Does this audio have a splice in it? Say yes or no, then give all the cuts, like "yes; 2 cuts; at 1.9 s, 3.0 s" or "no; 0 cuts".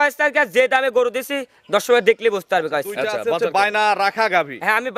yes; 1 cut; at 3.2 s